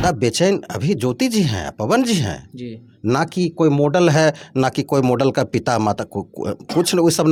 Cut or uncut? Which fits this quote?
uncut